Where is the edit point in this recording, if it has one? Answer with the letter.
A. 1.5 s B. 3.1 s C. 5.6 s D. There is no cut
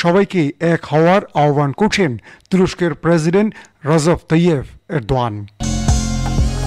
C